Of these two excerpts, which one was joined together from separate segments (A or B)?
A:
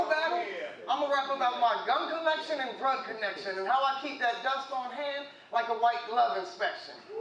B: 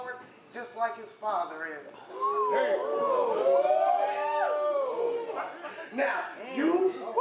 B